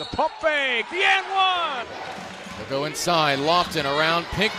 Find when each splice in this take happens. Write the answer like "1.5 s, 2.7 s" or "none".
1.9 s